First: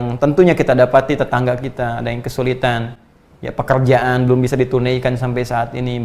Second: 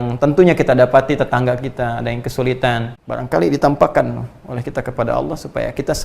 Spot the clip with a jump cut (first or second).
second